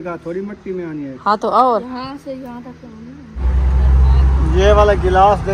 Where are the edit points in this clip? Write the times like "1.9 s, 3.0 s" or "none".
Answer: 3.4 s